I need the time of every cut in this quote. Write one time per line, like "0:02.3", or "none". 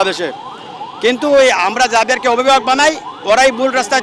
none